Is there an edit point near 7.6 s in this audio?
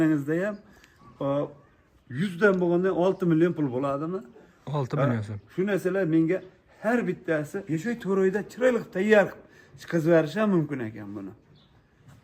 yes; 1 cut; at 7.6 s

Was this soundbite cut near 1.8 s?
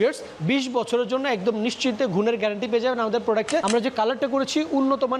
no; 1 cut; at 3.6 s

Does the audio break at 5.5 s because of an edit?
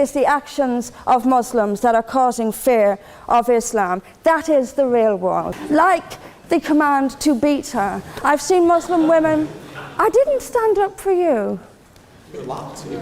yes; 1 cut; at 5.5 s

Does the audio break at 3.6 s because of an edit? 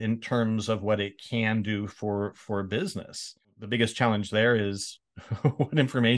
yes; 1 cut; at 3.6 s

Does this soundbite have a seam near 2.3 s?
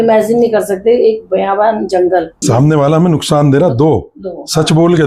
yes; 1 cut; at 2.3 s

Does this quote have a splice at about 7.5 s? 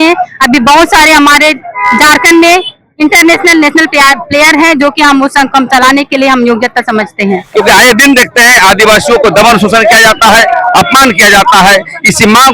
yes; 1 cut; at 7.5 s

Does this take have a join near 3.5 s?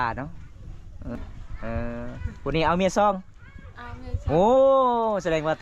no; 1 cut; at 1.2 s

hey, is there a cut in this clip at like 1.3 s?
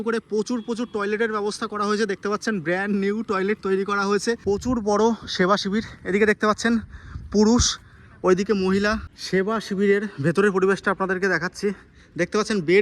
no; 2 cuts; at 4.4 s, 9.1 s

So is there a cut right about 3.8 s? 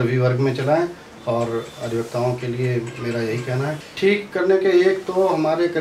yes; 1 cut; at 3.8 s

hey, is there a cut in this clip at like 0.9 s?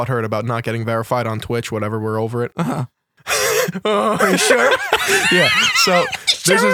no; 1 cut; at 2.5 s

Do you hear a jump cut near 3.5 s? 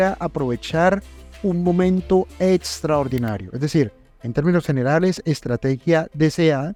no; 0 cuts

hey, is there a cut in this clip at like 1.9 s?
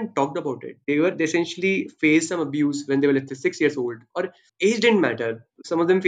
no; 1 cut; at 4.4 s

